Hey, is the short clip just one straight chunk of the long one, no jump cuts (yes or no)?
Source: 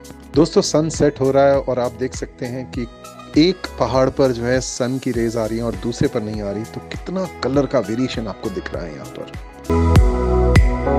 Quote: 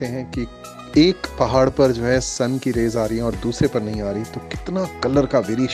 yes